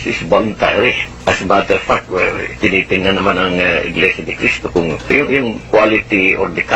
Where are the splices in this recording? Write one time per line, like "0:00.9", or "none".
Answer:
0:01.1
0:05.1